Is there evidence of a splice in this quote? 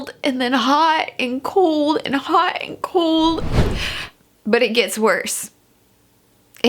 yes; 1 cut; at 3.4 s

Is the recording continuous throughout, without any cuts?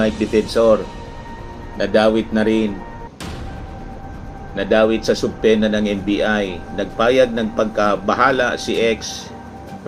yes; 0 cuts

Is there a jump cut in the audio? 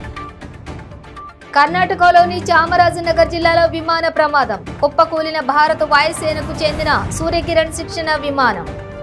yes; 1 cut; at 1.4 s

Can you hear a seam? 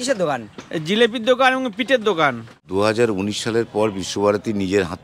yes; 1 cut; at 2.6 s

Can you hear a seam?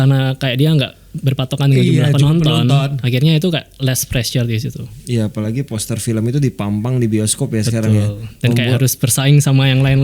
yes; 1 cut; at 4.9 s

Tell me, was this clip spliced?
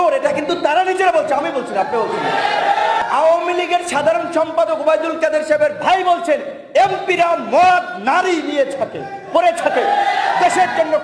yes; 1 cut; at 3.0 s

